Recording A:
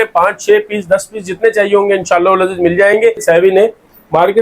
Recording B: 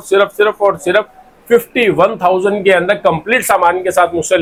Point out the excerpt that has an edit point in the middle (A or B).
A